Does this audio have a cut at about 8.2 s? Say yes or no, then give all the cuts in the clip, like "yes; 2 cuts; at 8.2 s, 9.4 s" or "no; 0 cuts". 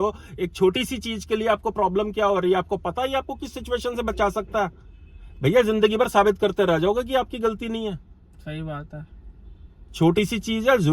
no; 0 cuts